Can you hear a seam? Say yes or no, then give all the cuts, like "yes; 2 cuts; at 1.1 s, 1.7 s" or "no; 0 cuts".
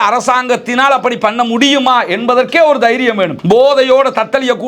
yes; 1 cut; at 3.4 s